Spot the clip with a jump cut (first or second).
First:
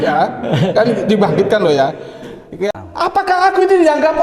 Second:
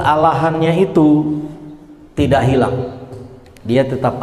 first